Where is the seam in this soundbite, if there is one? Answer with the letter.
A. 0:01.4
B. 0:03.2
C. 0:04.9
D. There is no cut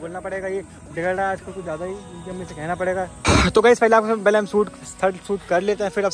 B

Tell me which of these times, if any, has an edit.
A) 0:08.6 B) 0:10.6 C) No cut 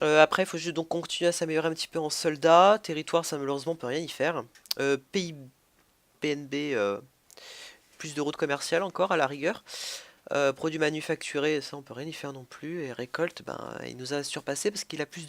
B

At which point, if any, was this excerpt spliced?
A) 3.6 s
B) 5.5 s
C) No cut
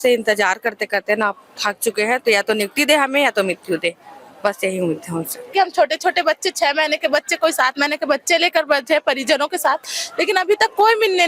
B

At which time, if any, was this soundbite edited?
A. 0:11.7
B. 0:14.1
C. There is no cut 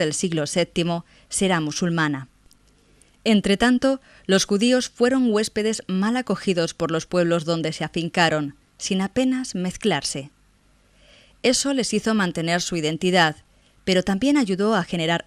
C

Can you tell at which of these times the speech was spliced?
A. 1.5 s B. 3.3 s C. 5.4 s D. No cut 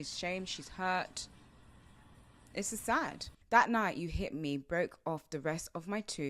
B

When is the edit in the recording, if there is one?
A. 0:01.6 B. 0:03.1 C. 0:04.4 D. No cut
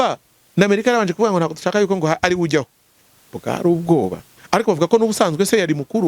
C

